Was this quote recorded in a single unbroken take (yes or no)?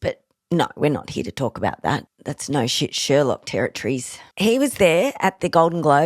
yes